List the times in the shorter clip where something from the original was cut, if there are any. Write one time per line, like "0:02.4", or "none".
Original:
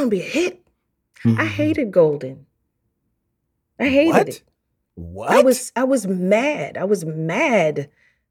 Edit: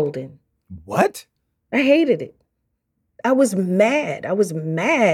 0:03.1

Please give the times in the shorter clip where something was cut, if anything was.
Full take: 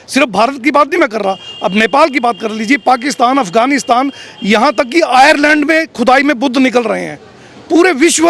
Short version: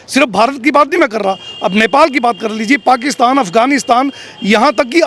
none

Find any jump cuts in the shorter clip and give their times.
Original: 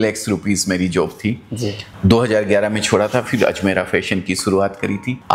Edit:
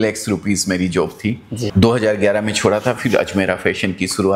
0:01.7

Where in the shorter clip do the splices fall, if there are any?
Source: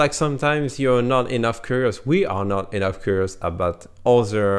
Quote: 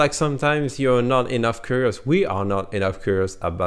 none

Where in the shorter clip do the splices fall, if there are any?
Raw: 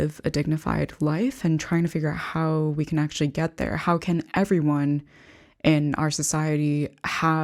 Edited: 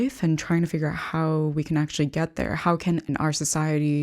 0:03.1

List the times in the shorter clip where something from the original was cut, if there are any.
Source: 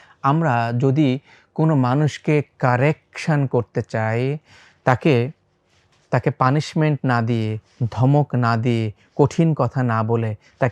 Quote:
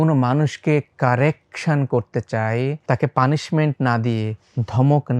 0:02.8

